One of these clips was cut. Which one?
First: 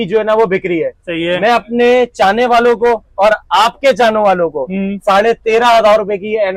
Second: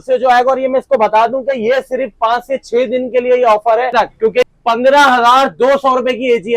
second; 1 cut; at 4.5 s

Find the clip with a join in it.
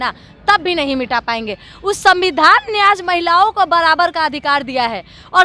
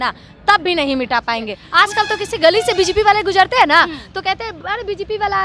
second; 1 cut; at 1.6 s

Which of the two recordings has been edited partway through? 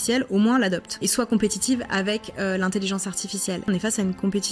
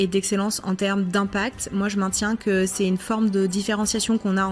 first; 2 cuts; at 1.0 s, 3.7 s

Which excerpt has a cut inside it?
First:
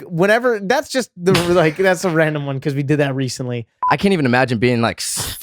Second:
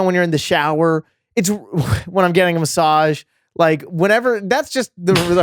first; 1 cut; at 3.7 s

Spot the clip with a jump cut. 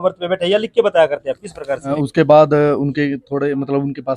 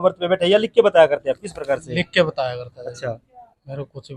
first; 1 cut; at 1.9 s

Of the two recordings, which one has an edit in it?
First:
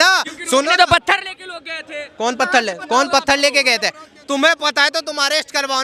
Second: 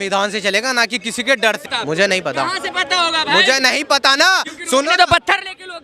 second; 1 cut; at 1.6 s

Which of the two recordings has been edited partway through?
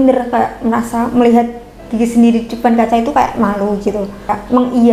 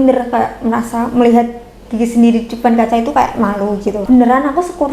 second; 1 cut; at 4.0 s

